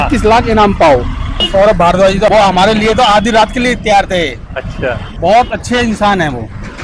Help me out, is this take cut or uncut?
cut